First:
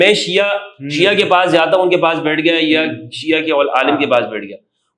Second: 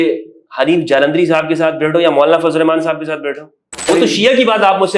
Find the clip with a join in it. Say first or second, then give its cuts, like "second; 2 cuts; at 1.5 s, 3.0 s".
second; 1 cut; at 3.8 s